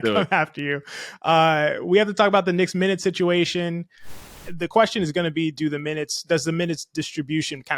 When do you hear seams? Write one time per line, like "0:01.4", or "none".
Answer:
0:04.1